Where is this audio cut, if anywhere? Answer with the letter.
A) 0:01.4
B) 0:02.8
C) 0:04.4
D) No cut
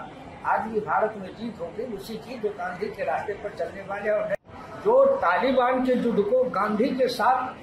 C